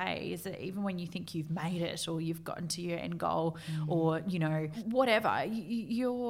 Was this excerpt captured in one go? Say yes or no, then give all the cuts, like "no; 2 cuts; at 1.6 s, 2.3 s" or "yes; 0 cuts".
no; 1 cut; at 4.8 s